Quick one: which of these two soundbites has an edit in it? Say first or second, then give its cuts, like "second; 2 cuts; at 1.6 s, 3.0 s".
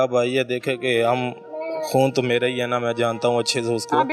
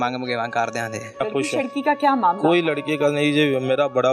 second; 1 cut; at 1.2 s